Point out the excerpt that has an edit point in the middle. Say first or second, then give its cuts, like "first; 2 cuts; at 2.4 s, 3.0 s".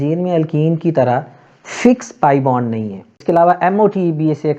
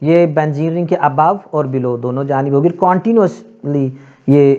first; 1 cut; at 3.1 s